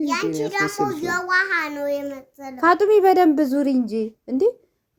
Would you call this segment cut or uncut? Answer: uncut